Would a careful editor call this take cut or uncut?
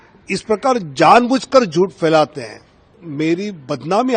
cut